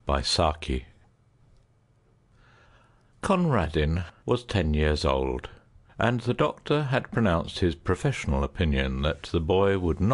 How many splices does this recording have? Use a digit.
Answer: 0